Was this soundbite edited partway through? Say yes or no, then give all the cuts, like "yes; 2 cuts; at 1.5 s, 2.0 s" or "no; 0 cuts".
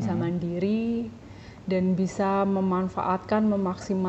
no; 0 cuts